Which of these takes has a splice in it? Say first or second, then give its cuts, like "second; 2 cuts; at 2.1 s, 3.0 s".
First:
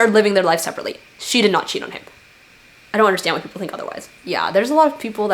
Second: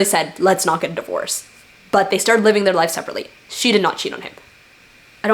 first; 1 cut; at 4.1 s